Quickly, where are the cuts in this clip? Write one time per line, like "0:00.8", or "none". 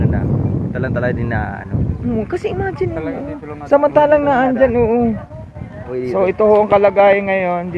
0:05.9